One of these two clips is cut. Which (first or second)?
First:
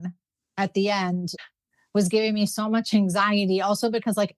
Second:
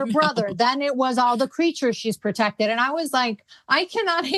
first